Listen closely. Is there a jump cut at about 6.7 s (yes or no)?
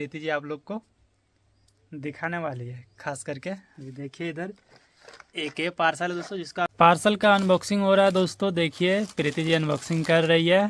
yes